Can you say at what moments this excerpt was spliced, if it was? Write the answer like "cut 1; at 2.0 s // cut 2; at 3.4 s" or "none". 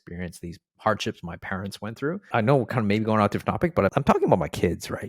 cut 1; at 2.2 s // cut 2; at 3.9 s